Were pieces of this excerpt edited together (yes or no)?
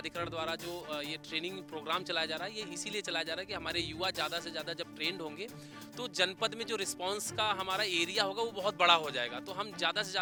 no